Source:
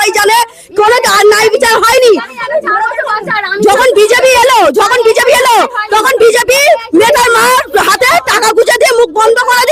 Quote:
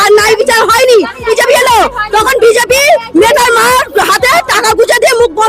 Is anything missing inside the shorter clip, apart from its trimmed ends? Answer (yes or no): yes